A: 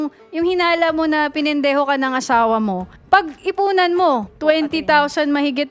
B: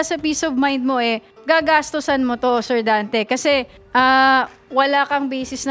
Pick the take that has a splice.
A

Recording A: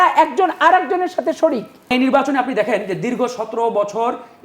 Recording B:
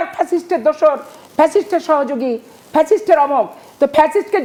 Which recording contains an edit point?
A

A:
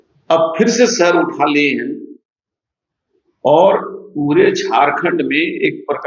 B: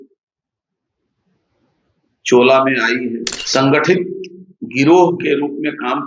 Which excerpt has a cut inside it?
B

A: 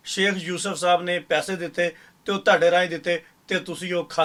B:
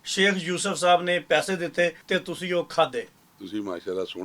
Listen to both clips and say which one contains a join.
B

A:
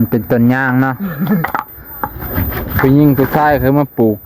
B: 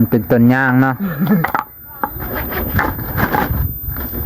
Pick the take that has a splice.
A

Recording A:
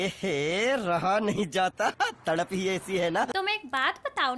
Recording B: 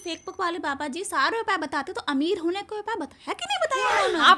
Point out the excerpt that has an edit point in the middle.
A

